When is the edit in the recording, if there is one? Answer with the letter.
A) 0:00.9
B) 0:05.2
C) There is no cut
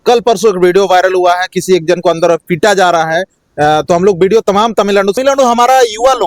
B